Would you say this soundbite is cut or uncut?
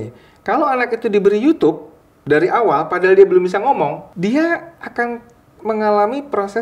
cut